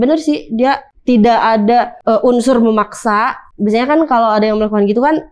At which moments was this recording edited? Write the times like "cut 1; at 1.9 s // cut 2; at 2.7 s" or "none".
cut 1; at 0.9 s // cut 2; at 1.9 s // cut 3; at 3.4 s